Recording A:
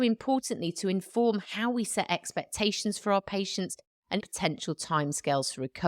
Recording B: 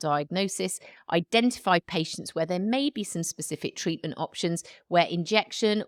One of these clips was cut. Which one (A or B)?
A